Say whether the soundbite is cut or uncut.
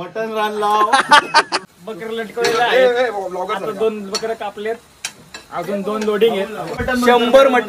cut